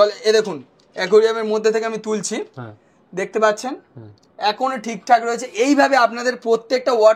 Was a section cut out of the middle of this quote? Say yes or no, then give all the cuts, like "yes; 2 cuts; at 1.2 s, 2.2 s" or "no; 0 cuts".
no; 0 cuts